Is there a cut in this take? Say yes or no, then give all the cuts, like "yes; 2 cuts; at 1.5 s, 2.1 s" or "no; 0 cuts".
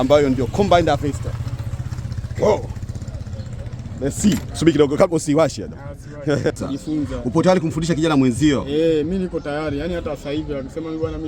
yes; 1 cut; at 6.6 s